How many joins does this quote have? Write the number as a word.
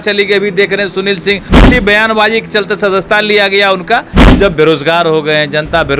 two